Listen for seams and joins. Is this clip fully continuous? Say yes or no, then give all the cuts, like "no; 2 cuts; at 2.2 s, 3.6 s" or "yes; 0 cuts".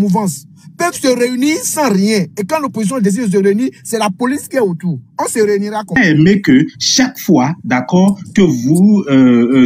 no; 1 cut; at 6.0 s